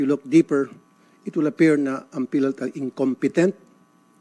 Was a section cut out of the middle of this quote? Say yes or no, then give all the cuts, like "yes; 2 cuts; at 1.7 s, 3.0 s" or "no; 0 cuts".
no; 0 cuts